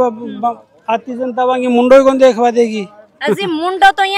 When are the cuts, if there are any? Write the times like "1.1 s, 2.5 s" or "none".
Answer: none